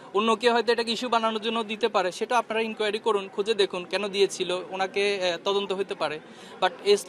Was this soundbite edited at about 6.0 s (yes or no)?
no